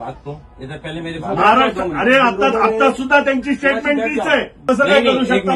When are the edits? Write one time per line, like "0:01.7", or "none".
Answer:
0:04.6